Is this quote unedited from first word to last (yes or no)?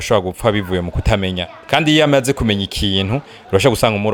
yes